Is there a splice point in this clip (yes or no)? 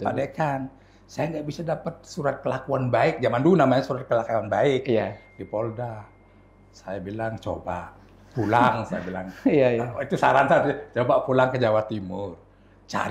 no